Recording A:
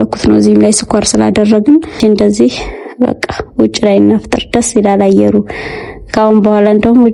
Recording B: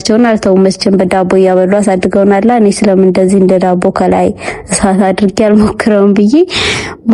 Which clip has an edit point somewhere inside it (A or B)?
A